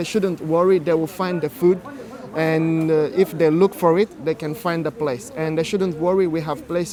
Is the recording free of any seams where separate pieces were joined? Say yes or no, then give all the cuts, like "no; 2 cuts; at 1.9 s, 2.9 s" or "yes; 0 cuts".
yes; 0 cuts